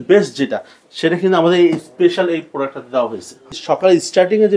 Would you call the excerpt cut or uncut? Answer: cut